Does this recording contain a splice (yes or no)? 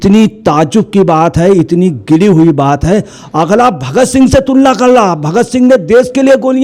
no